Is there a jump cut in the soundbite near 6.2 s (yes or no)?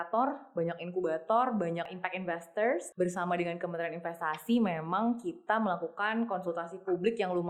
no